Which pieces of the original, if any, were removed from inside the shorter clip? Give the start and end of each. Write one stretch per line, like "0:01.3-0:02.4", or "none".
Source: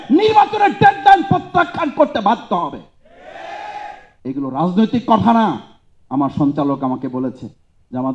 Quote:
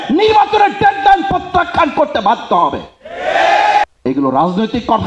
0:03.8-0:04.0